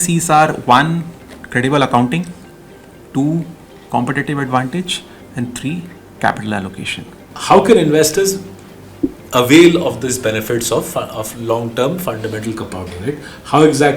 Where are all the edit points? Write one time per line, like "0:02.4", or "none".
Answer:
0:07.3